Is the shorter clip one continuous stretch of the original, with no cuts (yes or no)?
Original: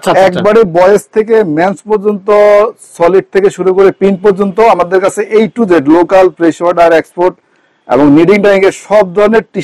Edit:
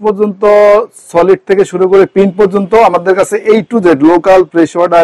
yes